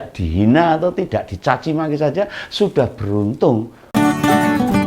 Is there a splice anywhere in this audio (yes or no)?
yes